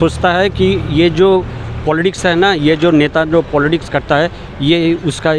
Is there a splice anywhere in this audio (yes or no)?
no